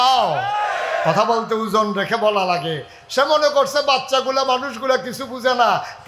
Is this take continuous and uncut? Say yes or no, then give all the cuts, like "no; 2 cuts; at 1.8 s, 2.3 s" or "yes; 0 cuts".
yes; 0 cuts